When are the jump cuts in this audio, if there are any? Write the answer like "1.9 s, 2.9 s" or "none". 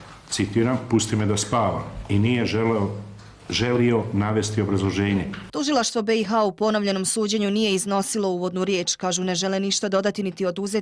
3.4 s